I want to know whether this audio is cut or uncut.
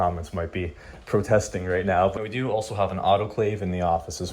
cut